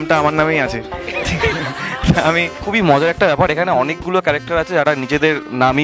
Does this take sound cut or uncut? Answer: cut